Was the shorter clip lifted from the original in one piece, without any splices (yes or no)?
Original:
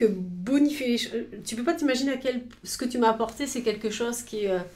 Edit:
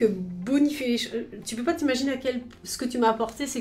yes